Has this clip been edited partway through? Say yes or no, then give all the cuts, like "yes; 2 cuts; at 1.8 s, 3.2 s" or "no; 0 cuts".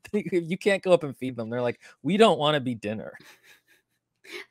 yes; 1 cut; at 3.1 s